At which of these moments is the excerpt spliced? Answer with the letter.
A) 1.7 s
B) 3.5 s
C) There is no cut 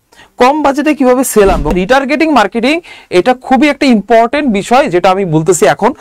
A